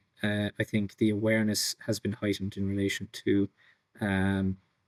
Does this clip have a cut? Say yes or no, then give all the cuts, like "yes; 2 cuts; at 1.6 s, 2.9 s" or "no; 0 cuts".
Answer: no; 0 cuts